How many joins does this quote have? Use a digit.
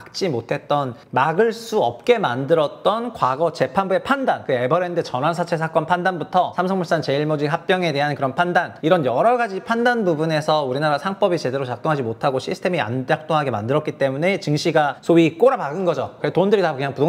6